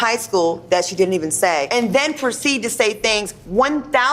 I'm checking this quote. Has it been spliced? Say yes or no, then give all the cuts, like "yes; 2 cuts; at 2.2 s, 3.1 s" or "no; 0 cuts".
yes; 1 cut; at 1.7 s